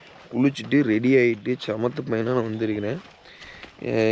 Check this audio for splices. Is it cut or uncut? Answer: uncut